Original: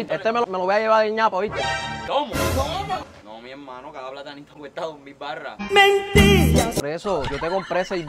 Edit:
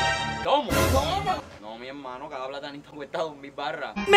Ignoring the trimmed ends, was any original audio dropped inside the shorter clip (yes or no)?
no